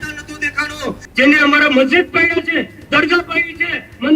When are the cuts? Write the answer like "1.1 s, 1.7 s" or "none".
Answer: 1.0 s